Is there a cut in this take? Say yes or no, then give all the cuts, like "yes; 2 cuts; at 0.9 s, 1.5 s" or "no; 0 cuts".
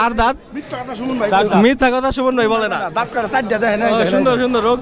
no; 0 cuts